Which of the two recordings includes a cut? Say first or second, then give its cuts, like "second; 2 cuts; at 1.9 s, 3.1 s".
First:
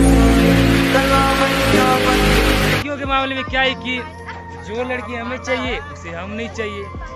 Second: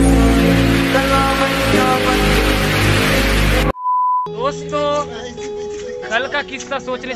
first; 1 cut; at 2.8 s